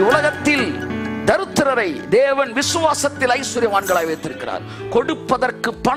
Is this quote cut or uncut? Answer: uncut